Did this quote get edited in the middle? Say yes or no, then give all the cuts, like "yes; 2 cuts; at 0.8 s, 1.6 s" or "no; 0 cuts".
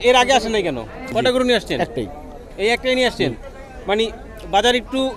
yes; 1 cut; at 1.1 s